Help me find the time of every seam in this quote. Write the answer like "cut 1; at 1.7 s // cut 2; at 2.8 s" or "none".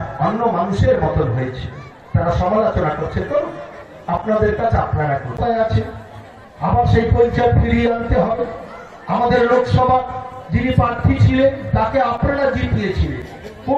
cut 1; at 5.4 s

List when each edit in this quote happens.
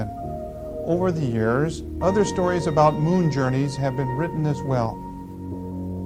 cut 1; at 1.3 s

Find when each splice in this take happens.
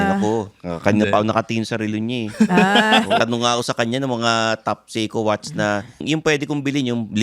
cut 1; at 3.2 s // cut 2; at 6.0 s

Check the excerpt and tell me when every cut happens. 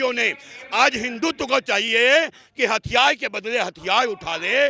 none

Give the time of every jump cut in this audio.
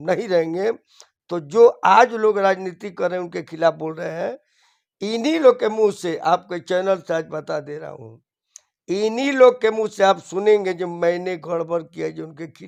none

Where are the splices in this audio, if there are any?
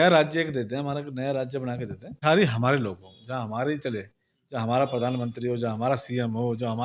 cut 1; at 2.2 s

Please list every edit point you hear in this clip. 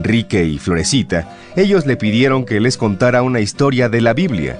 none

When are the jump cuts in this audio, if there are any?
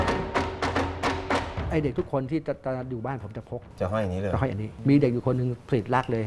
cut 1; at 1.6 s // cut 2; at 3.7 s // cut 3; at 4.7 s

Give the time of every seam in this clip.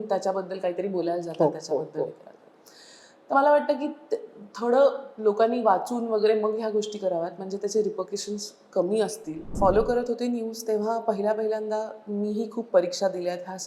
cut 1; at 9.5 s

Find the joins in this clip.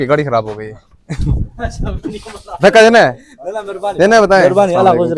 none

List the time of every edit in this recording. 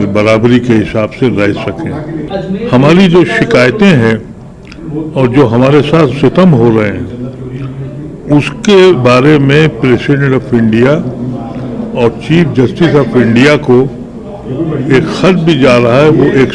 cut 1; at 2.3 s

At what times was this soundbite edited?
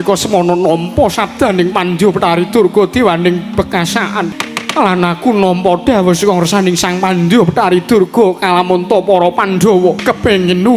cut 1; at 4.4 s // cut 2; at 10.0 s

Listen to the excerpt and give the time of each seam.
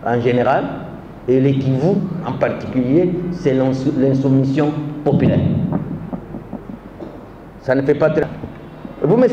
cut 1; at 8.2 s

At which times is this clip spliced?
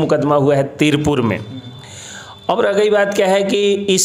none

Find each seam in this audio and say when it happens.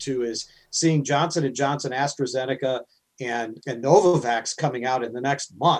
none

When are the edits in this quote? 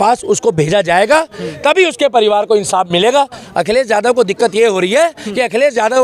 cut 1; at 3.4 s

